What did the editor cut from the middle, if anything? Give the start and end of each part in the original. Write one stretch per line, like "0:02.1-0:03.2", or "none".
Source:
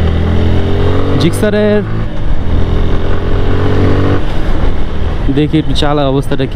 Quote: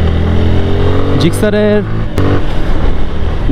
0:02.2-0:04.0